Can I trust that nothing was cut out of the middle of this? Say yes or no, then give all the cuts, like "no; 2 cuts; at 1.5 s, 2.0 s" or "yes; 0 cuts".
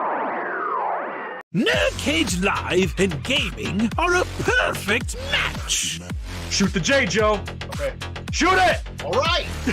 no; 1 cut; at 1.3 s